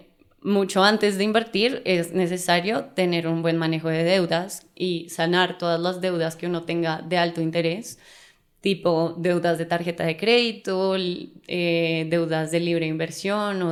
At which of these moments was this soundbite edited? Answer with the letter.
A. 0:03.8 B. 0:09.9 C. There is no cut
C